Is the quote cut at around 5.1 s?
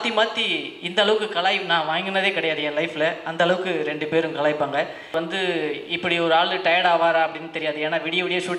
yes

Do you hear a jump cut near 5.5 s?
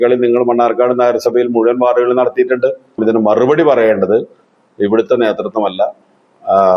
no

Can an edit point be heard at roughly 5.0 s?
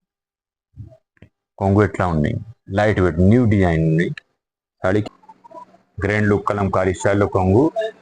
yes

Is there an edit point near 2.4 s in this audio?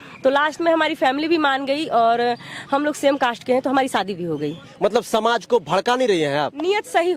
no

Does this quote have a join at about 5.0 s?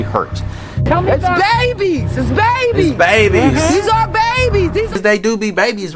yes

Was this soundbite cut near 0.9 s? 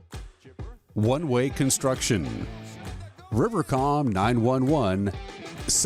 yes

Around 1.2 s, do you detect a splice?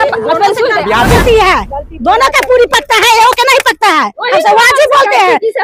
yes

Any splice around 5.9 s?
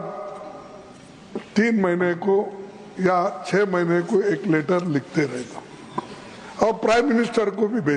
no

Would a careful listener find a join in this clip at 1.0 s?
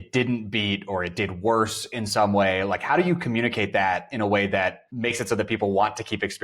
no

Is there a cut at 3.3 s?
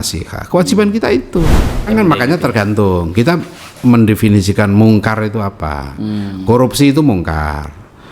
no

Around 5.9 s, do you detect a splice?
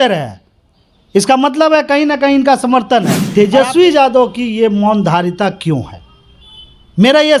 no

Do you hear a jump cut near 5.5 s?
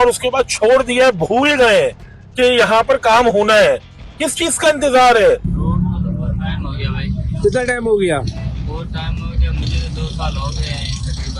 yes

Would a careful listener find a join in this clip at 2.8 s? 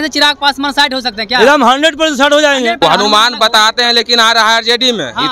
yes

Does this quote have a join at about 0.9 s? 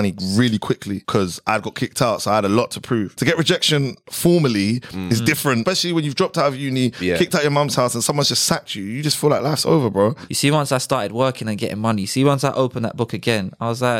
yes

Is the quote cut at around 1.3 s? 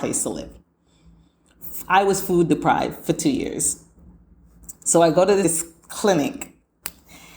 no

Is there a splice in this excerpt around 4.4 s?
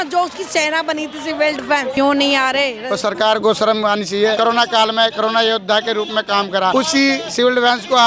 yes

